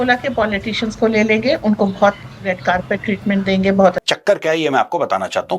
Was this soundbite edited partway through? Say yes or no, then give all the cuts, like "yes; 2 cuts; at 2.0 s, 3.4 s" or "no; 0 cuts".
yes; 1 cut; at 4.0 s